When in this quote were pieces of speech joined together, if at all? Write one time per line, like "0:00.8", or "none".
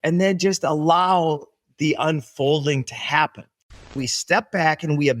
0:03.9